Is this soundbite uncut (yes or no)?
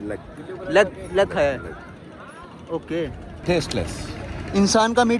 no